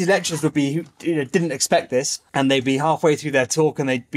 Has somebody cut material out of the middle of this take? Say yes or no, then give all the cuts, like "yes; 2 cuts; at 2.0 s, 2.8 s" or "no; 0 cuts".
yes; 1 cut; at 2.2 s